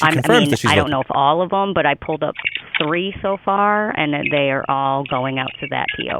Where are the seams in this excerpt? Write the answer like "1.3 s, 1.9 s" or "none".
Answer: none